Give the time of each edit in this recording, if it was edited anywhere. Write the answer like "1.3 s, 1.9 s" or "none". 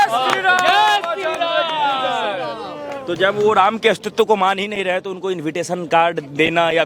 none